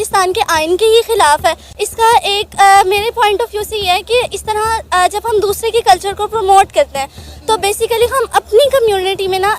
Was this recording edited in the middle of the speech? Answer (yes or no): yes